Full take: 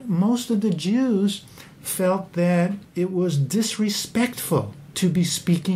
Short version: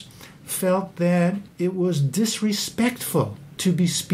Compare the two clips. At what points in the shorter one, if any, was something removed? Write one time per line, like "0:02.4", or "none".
none